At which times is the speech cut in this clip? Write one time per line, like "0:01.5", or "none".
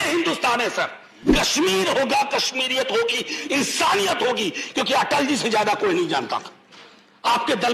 0:01.3

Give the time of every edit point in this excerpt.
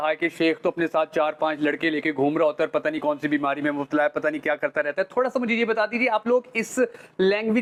none

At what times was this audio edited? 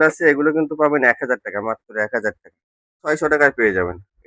0:03.0

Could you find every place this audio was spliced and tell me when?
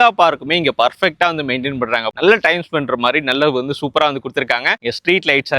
0:02.1

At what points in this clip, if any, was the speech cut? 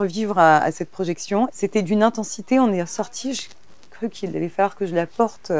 0:01.5

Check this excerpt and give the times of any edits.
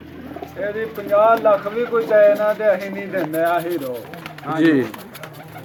none

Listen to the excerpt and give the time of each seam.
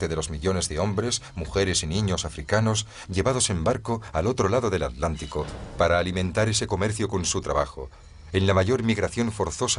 0:02.3

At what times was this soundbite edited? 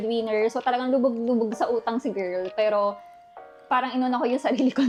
none

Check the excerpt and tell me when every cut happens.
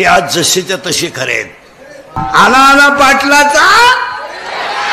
0:02.2

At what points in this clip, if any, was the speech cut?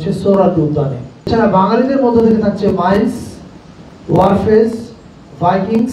0:01.3

